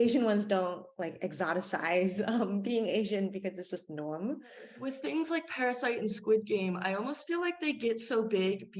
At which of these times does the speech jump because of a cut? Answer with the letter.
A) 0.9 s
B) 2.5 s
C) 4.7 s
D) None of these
C